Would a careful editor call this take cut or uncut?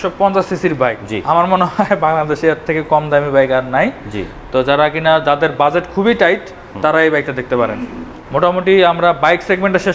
uncut